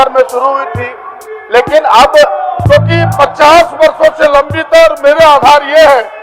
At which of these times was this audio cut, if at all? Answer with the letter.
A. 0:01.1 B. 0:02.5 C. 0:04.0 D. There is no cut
B